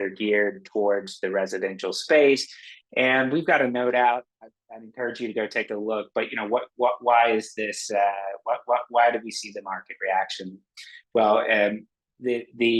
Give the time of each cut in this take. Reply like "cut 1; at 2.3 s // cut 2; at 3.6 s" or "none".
none

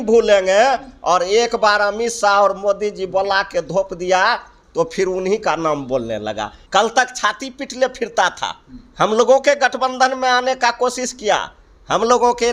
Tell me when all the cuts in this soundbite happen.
cut 1; at 6.5 s

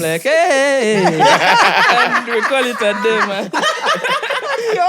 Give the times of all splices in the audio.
none

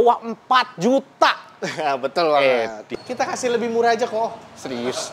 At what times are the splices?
cut 1; at 2.8 s

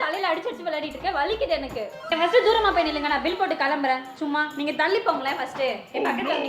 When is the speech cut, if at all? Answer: cut 1; at 1.9 s

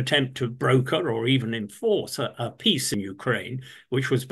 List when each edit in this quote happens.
cut 1; at 2.9 s

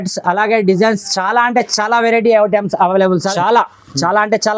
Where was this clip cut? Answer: cut 1; at 3.3 s

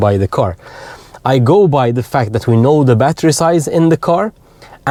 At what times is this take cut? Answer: none

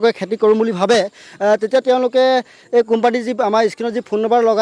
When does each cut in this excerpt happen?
none

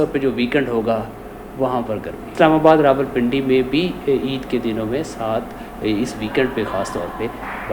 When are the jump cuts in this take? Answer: cut 1; at 2.3 s

